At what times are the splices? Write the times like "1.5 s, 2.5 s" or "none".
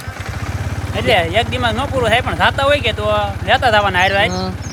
none